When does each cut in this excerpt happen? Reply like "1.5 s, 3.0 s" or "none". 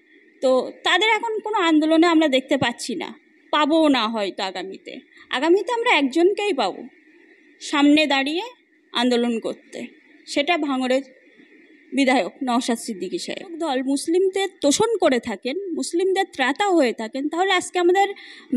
13.6 s